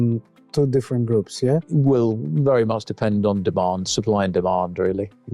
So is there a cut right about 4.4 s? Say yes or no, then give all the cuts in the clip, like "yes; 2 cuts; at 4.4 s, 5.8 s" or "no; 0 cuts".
no; 1 cut; at 1.7 s